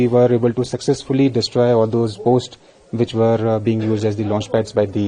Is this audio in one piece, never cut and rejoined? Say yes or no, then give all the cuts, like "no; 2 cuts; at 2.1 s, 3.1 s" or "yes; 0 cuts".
yes; 0 cuts